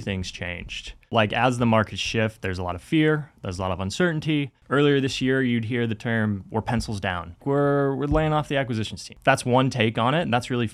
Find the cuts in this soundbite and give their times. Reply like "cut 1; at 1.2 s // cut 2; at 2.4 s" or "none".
cut 1; at 1.1 s // cut 2; at 4.6 s // cut 3; at 7.4 s // cut 4; at 9.0 s